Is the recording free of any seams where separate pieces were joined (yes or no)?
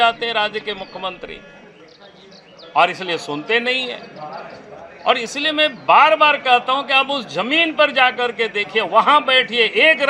yes